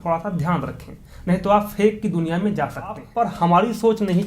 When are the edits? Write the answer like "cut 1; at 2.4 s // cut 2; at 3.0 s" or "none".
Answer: cut 1; at 3.1 s